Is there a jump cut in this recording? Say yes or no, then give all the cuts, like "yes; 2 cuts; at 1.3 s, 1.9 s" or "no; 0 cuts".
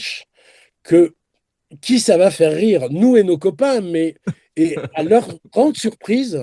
no; 0 cuts